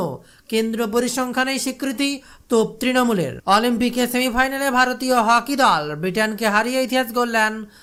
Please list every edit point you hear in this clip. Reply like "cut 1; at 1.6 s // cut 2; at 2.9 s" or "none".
none